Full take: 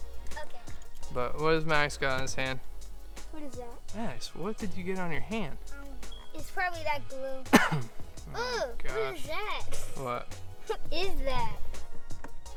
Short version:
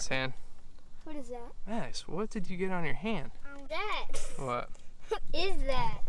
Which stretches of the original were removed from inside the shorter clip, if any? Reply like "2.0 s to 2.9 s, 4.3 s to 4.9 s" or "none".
5.9 s to 9.2 s

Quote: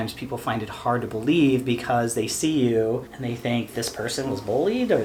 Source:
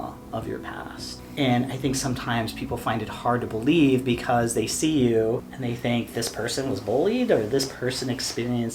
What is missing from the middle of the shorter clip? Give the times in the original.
none

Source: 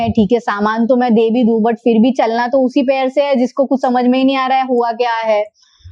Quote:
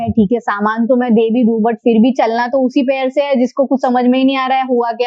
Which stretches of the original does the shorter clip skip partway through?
none

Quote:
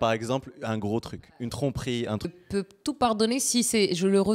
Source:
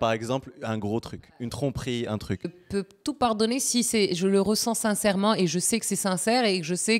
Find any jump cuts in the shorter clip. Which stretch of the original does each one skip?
2.2 s to 2.4 s

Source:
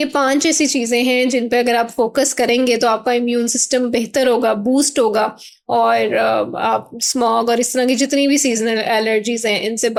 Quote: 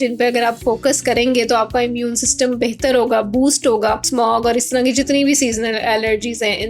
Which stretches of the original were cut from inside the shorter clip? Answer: 5.4 s to 7.1 s

